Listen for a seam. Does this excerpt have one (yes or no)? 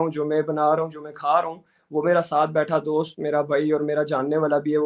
no